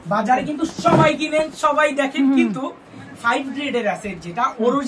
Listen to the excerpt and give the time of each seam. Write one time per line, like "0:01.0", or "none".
none